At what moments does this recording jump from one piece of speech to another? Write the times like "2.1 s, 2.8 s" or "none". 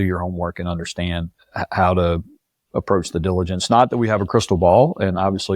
1.4 s